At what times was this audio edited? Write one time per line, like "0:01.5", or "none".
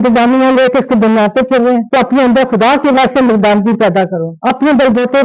0:01.9